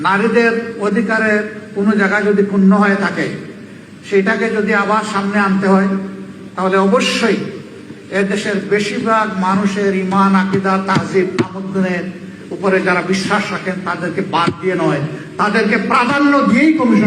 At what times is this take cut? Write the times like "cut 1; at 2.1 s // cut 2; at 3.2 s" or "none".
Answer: cut 1; at 13.5 s